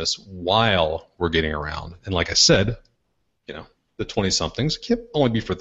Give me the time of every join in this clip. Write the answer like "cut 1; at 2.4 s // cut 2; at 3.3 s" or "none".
none